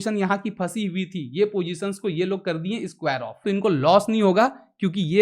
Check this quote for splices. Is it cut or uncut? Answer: cut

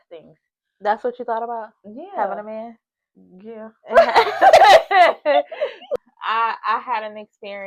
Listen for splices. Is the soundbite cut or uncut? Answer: cut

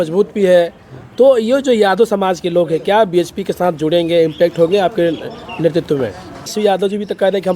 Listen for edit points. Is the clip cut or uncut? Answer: cut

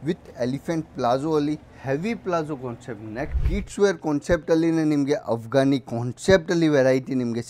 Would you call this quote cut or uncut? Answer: cut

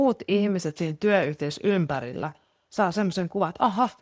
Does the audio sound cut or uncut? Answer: uncut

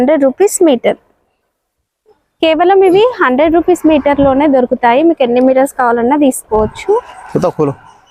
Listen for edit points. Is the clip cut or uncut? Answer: uncut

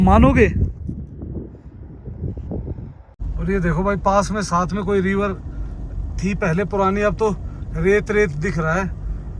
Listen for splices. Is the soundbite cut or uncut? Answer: cut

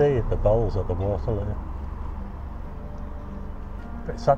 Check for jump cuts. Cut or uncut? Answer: uncut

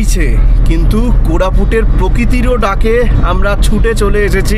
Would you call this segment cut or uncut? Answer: uncut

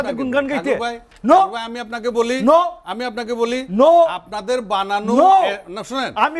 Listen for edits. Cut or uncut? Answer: uncut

